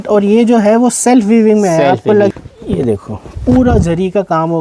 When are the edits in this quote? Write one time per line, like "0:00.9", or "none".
0:02.3